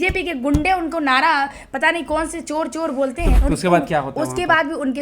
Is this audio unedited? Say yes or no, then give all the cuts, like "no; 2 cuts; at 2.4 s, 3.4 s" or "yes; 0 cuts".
no; 1 cut; at 3.3 s